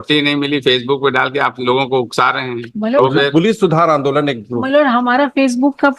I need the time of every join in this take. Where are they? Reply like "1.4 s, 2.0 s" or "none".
none